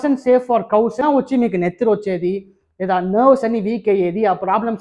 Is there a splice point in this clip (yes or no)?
yes